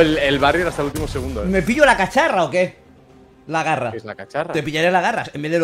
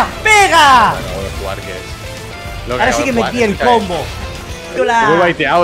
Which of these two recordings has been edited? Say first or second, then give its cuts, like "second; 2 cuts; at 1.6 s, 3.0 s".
second; 1 cut; at 4.6 s